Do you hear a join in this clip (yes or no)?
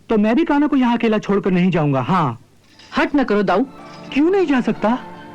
yes